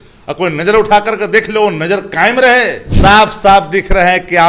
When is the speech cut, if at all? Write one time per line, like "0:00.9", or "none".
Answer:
0:02.8